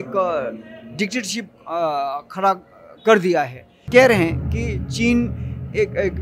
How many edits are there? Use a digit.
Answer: 1